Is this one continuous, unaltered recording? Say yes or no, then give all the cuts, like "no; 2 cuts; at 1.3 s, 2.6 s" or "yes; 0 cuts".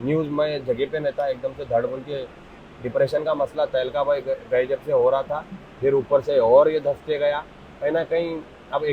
yes; 0 cuts